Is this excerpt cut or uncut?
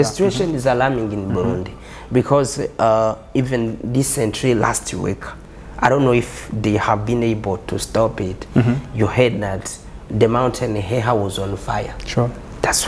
uncut